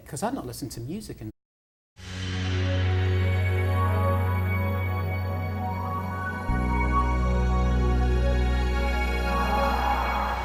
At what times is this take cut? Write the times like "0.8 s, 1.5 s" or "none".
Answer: none